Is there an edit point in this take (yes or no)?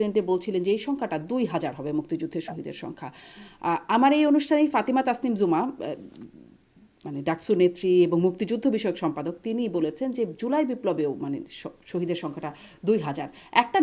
no